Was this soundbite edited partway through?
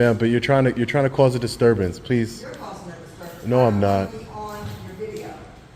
no; 0 cuts

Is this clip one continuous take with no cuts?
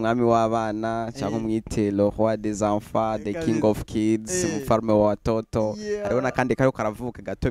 yes; 0 cuts

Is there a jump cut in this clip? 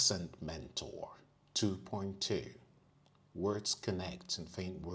no; 0 cuts

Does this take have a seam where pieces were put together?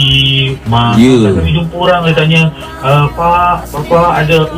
no; 0 cuts

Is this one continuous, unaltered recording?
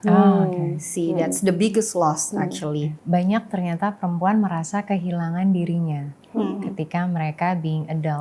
no; 1 cut; at 2.9 s

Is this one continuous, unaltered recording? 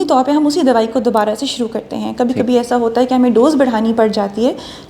yes; 0 cuts

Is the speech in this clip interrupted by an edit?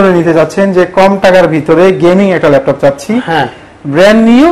no; 0 cuts

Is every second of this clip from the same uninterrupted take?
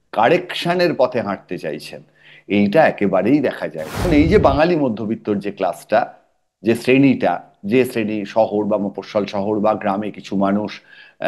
no; 1 cut; at 4.0 s

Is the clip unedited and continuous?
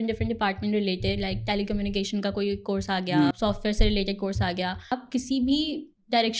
no; 2 cuts; at 3.3 s, 4.9 s

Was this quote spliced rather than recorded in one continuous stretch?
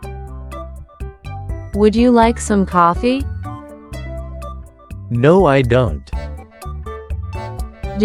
no; 0 cuts

